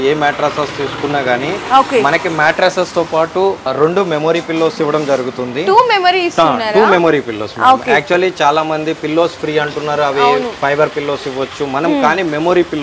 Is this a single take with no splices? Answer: yes; 0 cuts

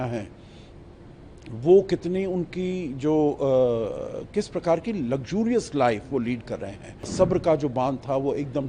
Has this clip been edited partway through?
yes; 1 cut; at 7.1 s

